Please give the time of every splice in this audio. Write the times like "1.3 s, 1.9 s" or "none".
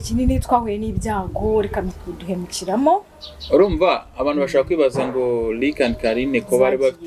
2.0 s